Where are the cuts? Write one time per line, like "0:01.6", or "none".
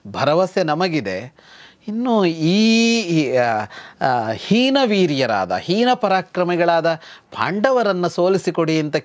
none